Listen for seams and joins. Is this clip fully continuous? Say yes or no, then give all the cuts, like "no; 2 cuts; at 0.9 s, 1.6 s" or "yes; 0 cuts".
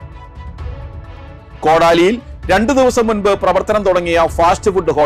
yes; 0 cuts